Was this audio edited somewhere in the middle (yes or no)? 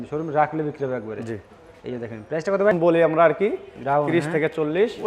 yes